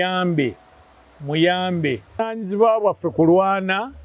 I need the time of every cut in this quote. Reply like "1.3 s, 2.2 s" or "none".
2.2 s